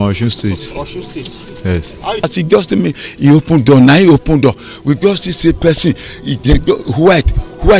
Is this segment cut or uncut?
cut